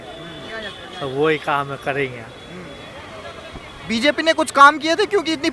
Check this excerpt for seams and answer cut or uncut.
uncut